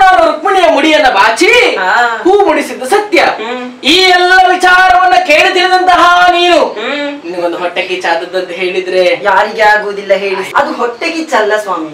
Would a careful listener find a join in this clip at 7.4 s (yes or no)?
no